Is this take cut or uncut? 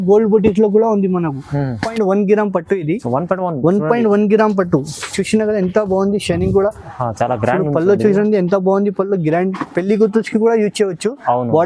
cut